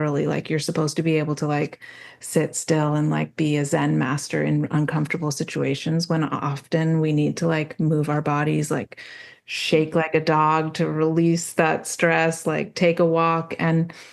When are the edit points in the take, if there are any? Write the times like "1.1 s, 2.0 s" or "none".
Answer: none